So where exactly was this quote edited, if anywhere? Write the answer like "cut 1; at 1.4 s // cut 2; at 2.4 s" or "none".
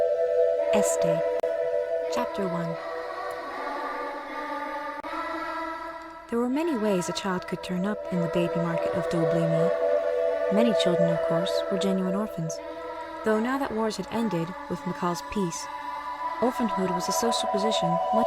cut 1; at 10.4 s

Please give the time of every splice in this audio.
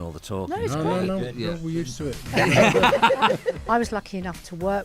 cut 1; at 2.3 s // cut 2; at 3.6 s

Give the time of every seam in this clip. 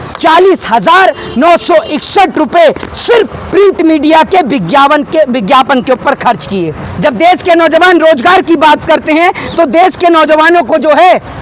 cut 1; at 6.9 s

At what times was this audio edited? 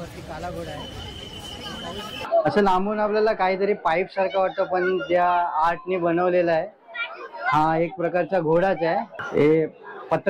cut 1; at 2.3 s // cut 2; at 9.2 s

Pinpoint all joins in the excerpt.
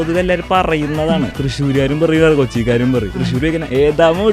cut 1; at 1.4 s // cut 2; at 3.3 s

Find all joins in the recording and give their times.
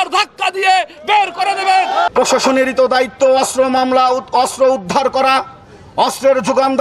cut 1; at 2.1 s

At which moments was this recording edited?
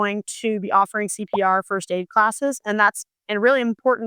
none

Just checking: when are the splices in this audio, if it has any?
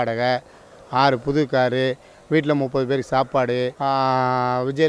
cut 1; at 3.7 s

